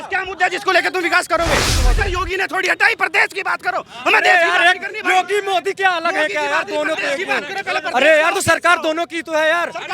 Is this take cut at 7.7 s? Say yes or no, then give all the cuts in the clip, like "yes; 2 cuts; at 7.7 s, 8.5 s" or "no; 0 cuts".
no; 1 cut; at 1.8 s